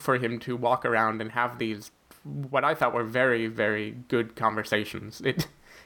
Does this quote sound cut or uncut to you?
uncut